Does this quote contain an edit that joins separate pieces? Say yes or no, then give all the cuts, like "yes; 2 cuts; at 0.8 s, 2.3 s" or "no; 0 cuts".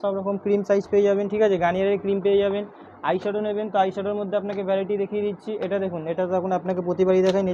no; 0 cuts